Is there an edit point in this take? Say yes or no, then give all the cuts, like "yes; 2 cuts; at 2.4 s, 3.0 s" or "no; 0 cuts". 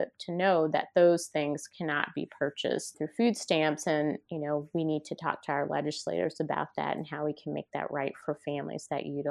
yes; 2 cuts; at 2.9 s, 8.2 s